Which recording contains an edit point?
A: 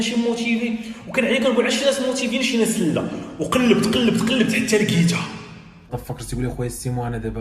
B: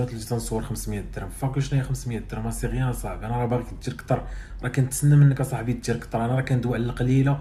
A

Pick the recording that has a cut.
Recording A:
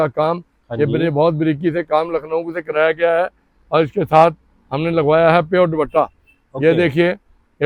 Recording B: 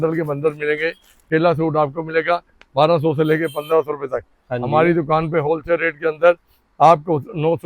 B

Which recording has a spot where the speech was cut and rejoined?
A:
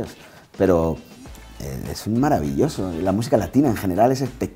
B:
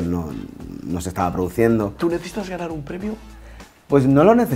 B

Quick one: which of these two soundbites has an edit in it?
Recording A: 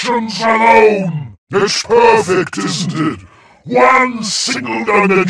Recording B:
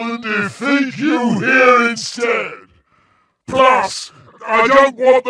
A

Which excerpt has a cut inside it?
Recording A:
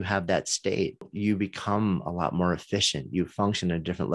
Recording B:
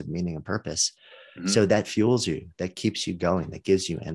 A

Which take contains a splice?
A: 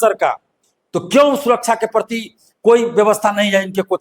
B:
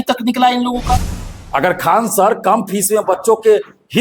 B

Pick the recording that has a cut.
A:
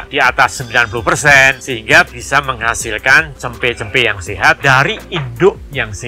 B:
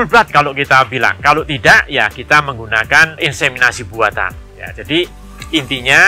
A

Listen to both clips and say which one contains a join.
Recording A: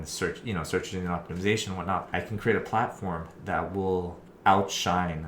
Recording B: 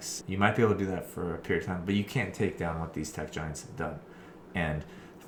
A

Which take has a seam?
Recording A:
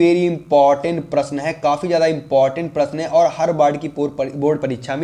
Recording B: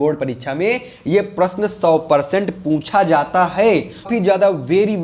B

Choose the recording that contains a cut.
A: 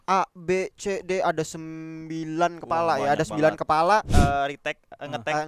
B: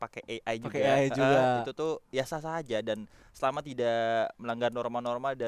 A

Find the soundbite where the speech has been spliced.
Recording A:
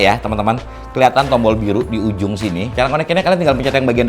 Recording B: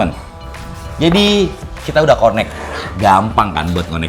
A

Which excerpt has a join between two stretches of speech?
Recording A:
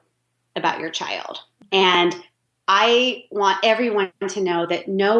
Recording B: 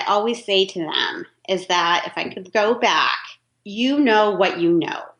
A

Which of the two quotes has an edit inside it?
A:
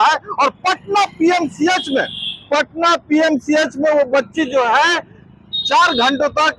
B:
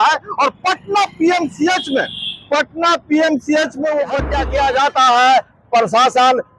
B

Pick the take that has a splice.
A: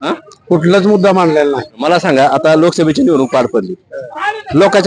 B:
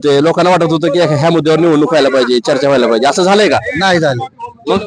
A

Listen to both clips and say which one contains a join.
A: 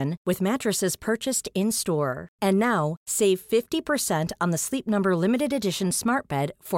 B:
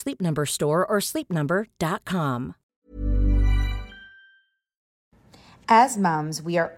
B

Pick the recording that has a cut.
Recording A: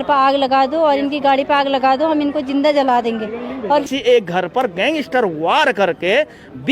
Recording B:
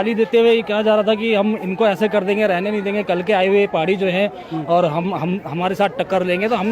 A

